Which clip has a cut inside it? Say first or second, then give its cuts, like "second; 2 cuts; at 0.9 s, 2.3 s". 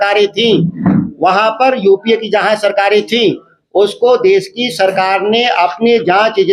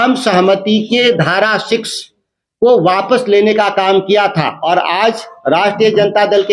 second; 1 cut; at 4.5 s